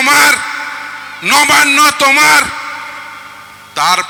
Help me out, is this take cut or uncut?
uncut